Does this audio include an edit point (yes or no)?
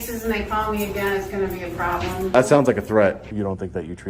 yes